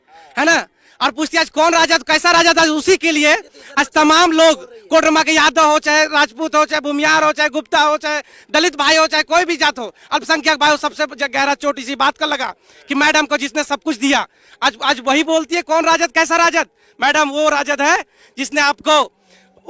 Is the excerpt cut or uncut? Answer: uncut